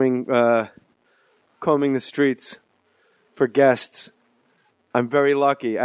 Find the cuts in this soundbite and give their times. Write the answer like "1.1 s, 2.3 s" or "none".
none